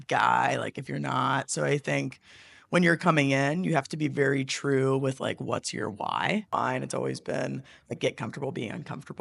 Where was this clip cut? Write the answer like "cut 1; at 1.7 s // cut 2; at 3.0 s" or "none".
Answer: cut 1; at 6.5 s